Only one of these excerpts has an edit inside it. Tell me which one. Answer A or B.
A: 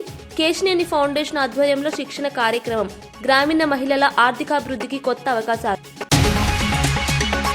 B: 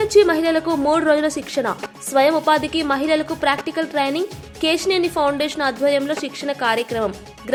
A